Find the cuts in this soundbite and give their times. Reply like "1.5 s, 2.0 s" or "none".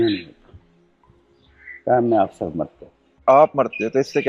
3.2 s

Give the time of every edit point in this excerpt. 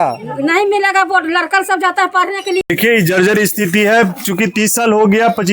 2.6 s

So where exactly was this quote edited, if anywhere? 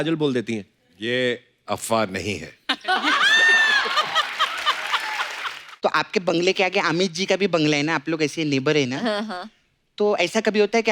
5.6 s

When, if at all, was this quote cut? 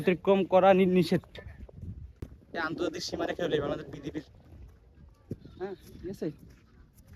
2.2 s

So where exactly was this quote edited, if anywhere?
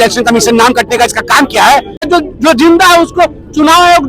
2.0 s

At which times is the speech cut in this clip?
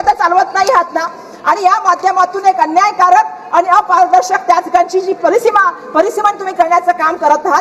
none

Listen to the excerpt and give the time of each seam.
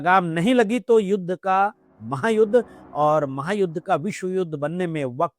none

